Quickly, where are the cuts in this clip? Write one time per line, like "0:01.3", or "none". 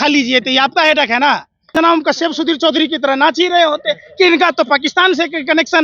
0:01.8